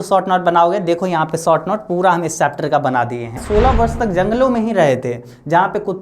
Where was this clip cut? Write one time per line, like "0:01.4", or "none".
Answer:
0:03.4